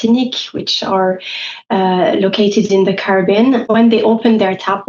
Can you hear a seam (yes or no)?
yes